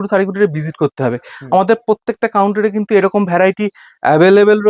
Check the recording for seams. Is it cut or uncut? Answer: uncut